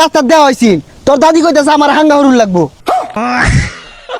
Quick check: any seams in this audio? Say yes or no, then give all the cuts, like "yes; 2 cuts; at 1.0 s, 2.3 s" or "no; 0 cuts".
yes; 1 cut; at 2.9 s